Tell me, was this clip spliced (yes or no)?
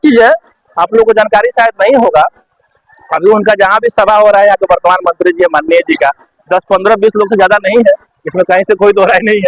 no